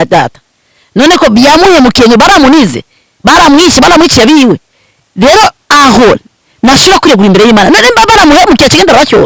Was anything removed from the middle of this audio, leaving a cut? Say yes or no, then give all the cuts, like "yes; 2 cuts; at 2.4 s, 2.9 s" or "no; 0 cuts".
no; 0 cuts